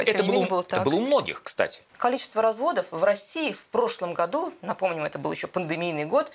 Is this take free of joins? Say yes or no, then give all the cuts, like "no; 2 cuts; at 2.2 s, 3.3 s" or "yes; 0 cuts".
no; 1 cut; at 1.8 s